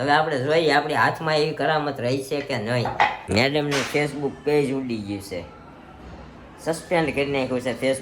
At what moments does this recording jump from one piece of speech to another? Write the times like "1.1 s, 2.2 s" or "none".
3.2 s